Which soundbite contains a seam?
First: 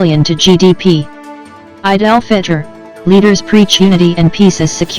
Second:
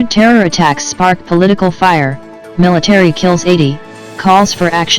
first; 1 cut; at 1.2 s

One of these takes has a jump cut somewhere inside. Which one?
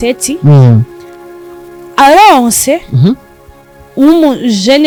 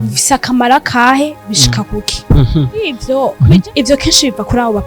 second; 1 cut; at 3.0 s

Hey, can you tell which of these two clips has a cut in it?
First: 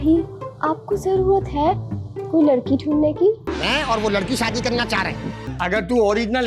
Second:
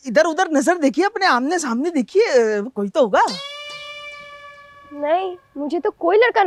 first; 2 cuts; at 3.5 s, 5.4 s

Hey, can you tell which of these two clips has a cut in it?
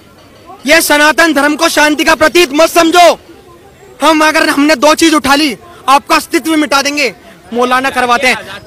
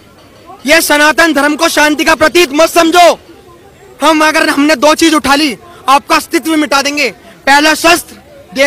first; 1 cut; at 7.4 s

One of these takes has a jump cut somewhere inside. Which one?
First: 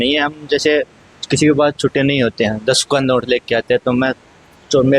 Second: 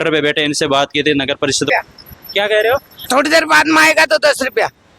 second; 1 cut; at 1.7 s

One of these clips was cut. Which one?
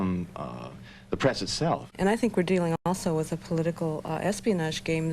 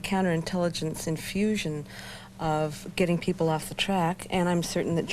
first; 1 cut; at 1.9 s

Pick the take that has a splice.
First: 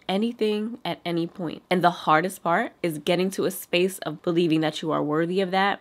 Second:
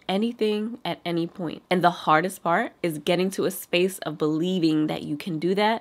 first; 1 cut; at 4.1 s

